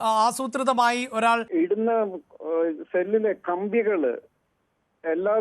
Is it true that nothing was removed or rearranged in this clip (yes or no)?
no